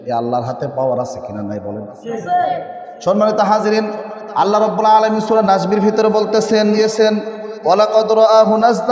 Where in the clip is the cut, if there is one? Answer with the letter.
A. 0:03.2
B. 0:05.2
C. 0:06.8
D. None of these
C